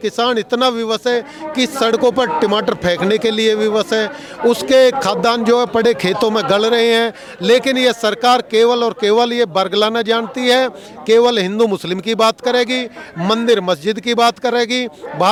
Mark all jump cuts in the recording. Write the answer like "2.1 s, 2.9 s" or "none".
none